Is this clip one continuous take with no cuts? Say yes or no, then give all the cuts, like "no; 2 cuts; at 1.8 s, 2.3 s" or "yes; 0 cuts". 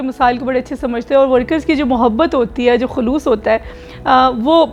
yes; 0 cuts